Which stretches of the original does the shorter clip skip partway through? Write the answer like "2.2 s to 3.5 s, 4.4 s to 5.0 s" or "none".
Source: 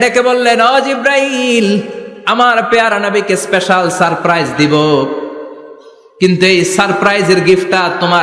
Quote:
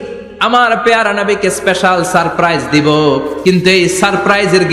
5.2 s to 6.1 s